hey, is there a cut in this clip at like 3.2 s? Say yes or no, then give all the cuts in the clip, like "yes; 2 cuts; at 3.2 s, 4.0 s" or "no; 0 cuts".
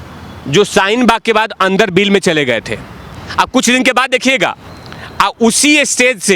yes; 1 cut; at 3.2 s